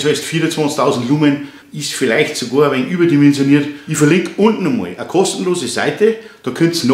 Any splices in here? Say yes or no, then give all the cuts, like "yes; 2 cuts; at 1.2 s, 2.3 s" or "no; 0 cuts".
yes; 2 cuts; at 1.6 s, 3.8 s